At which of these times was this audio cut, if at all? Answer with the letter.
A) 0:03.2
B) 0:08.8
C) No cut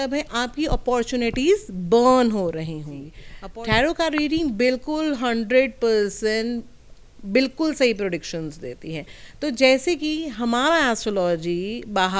A